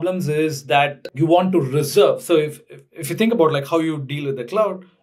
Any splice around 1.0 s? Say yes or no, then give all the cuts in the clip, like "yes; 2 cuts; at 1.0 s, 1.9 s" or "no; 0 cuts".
yes; 1 cut; at 1.0 s